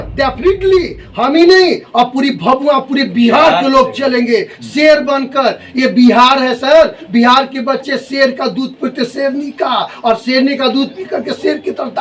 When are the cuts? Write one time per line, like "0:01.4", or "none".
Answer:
none